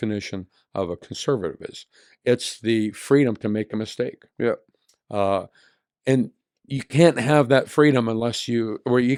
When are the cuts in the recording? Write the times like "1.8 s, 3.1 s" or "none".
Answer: none